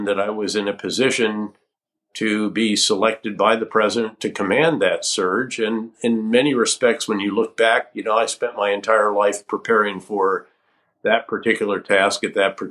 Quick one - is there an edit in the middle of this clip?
no; 0 cuts

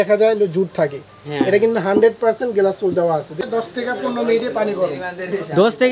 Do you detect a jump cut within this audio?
yes; 1 cut; at 3.4 s

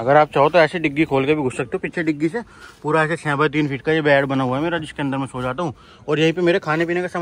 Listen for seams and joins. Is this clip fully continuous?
yes; 0 cuts

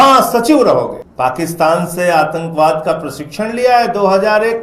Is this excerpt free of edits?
no; 1 cut; at 1.0 s

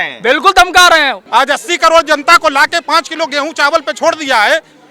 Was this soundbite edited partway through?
yes; 1 cut; at 1.2 s

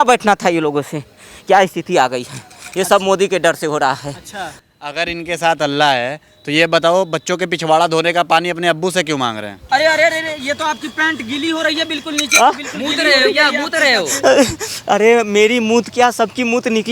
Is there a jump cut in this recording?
yes; 2 cuts; at 4.5 s, 9.5 s

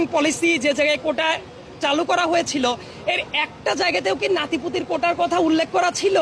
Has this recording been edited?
no; 0 cuts

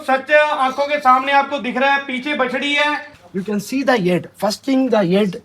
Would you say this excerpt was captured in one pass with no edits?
no; 1 cut; at 3.1 s

